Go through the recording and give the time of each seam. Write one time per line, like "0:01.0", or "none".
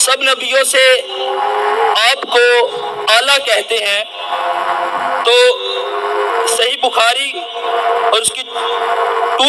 none